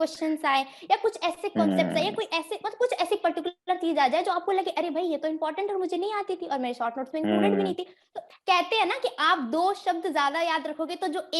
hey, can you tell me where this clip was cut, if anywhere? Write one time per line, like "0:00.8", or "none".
0:08.3